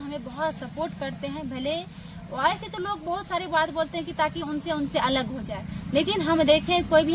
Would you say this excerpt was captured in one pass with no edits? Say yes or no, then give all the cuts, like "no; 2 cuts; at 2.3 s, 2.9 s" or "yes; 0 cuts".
yes; 0 cuts